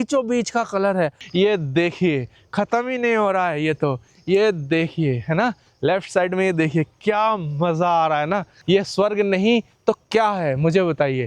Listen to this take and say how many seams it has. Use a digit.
2